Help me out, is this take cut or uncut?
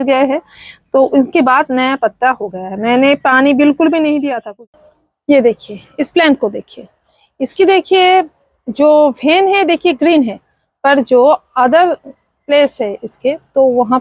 cut